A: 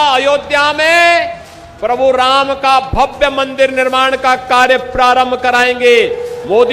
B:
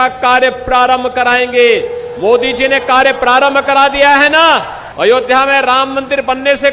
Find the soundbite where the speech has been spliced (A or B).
B